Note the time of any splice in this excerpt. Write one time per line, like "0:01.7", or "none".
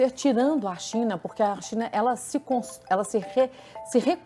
none